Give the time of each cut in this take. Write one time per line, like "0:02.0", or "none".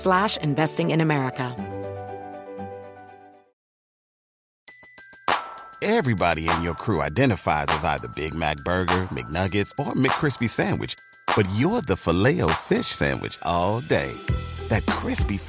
0:01.5